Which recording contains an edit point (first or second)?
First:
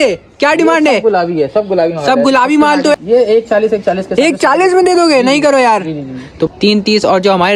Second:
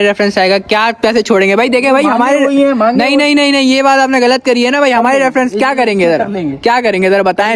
first